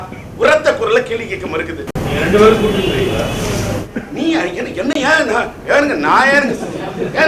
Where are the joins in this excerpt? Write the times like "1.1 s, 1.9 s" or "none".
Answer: 1.9 s